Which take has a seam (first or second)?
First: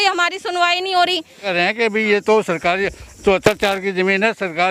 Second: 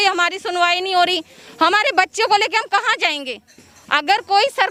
first